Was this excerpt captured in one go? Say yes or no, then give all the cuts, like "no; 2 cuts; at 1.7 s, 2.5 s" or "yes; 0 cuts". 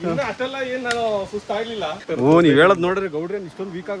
no; 1 cut; at 2.0 s